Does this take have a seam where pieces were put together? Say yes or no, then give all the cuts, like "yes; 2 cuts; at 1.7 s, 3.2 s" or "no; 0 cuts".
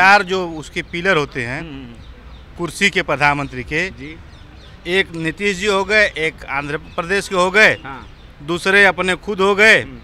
no; 0 cuts